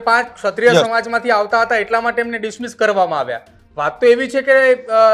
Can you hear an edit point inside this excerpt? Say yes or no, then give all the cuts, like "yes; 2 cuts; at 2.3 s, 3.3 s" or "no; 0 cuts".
no; 0 cuts